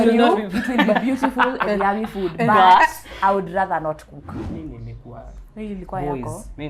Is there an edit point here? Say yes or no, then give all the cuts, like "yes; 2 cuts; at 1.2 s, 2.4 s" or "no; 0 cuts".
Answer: yes; 1 cut; at 4.3 s